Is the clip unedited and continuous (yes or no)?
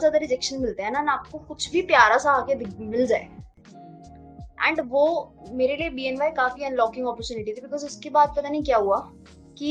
yes